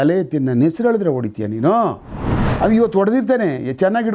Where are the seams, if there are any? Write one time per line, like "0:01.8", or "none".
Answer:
0:02.5

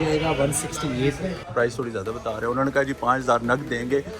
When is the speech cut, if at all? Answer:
0:01.4

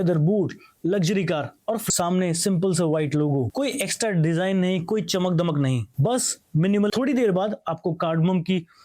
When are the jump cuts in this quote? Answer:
0:01.8
0:06.9

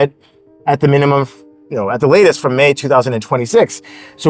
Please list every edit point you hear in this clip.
none

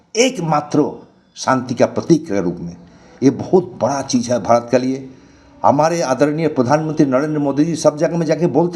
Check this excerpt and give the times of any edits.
none

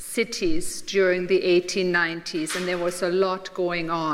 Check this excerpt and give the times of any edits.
0:01.2

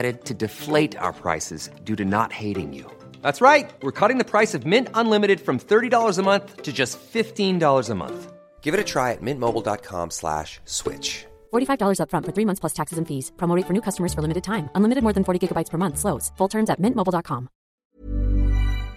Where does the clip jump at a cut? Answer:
0:18.0

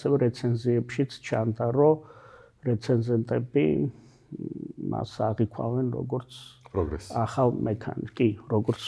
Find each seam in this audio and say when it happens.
none

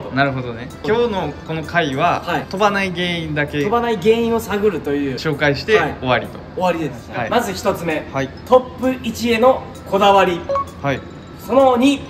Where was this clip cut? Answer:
0:07.0

